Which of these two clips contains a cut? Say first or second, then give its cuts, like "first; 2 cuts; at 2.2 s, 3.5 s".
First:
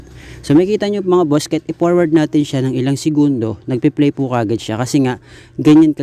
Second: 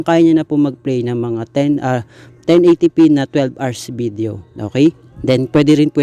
second; 1 cut; at 5.1 s